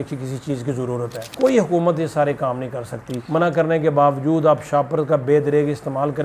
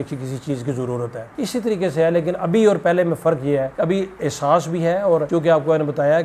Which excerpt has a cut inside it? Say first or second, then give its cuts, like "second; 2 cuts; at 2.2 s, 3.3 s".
first; 2 cuts; at 1.3 s, 3.2 s